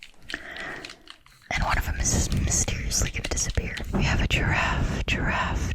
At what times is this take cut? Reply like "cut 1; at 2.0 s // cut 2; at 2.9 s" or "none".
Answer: cut 1; at 3.9 s